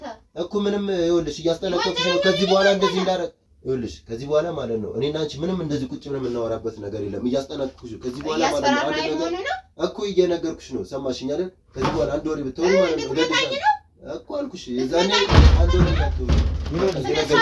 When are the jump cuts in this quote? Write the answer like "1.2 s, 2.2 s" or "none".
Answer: none